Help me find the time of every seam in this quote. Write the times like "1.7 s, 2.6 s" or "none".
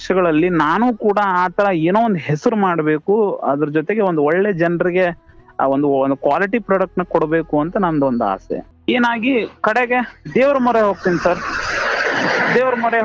8.7 s